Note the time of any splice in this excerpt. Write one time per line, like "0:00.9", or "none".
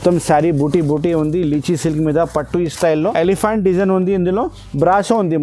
0:03.0